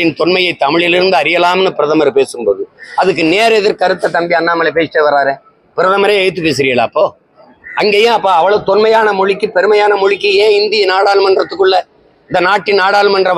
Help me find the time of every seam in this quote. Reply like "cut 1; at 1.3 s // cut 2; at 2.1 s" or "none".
none